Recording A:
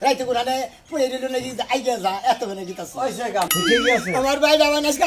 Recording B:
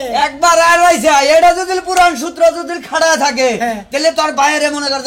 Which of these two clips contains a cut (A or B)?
A